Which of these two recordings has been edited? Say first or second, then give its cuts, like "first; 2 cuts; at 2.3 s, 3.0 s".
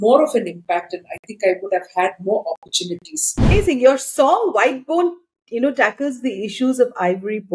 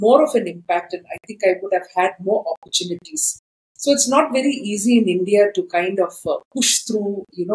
first; 1 cut; at 3.5 s